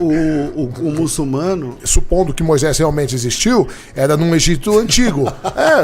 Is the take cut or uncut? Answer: cut